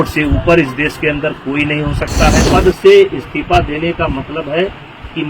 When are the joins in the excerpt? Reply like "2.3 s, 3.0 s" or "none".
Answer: 2.4 s